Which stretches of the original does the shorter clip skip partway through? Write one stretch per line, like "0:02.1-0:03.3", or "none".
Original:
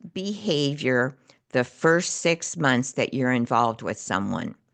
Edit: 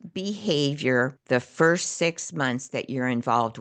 0:01.2-0:01.4